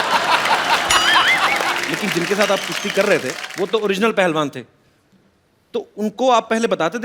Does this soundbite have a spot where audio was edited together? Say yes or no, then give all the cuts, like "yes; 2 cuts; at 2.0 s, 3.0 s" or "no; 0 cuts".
yes; 2 cuts; at 1.8 s, 3.4 s